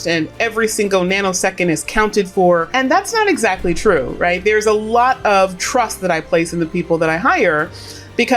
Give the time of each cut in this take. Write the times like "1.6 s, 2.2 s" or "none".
2.7 s